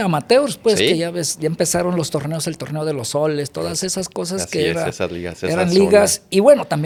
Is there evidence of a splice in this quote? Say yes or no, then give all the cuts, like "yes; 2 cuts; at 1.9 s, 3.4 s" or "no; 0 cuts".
no; 0 cuts